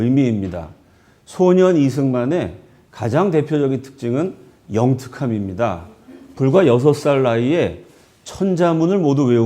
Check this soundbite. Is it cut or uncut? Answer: cut